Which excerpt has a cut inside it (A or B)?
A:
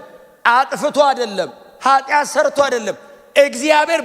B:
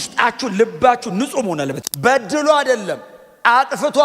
B